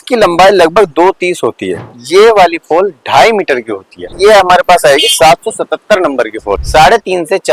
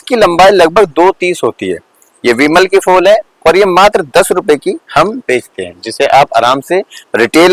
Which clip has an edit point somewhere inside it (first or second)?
first